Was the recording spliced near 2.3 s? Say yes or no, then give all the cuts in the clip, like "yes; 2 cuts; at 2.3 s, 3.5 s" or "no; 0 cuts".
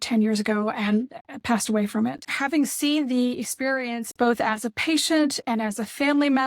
yes; 1 cut; at 2.3 s